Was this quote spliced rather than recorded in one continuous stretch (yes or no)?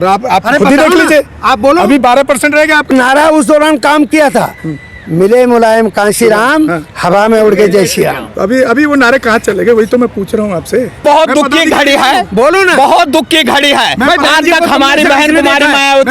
yes